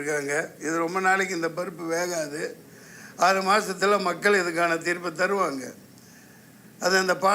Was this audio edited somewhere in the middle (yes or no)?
no